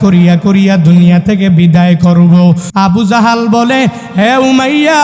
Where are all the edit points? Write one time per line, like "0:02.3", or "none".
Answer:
0:02.7